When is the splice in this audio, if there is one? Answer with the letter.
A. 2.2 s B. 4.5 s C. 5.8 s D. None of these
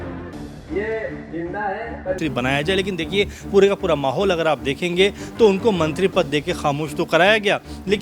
A